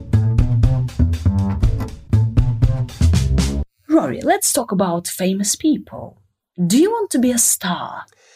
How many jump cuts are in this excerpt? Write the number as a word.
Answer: one